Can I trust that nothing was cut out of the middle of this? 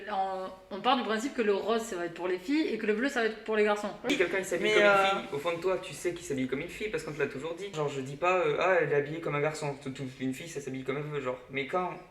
no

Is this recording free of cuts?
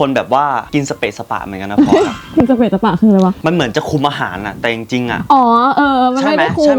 yes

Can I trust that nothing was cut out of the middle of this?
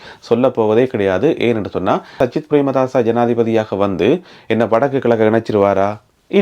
no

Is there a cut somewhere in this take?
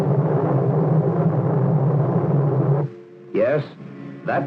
no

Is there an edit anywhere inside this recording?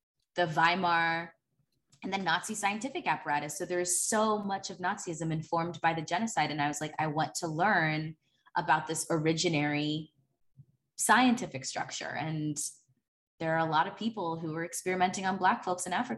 no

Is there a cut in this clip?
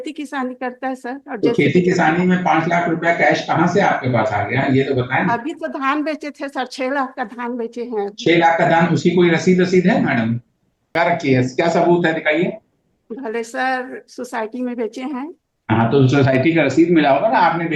yes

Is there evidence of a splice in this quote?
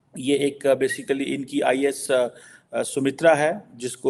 no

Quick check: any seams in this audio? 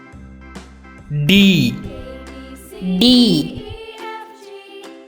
yes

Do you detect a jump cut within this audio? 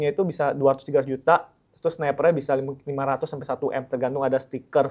no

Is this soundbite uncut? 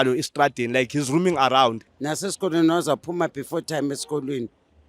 no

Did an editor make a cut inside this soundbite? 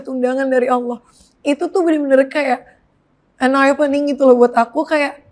no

